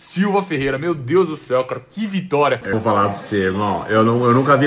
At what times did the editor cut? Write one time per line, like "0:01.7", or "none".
0:02.7